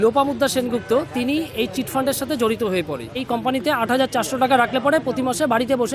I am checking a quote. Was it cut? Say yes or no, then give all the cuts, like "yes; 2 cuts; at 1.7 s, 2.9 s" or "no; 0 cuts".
yes; 1 cut; at 3.3 s